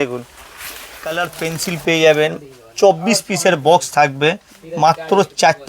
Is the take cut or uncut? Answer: cut